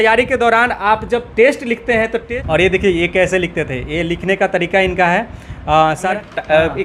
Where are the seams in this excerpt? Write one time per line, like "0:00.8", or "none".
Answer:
0:02.2
0:06.1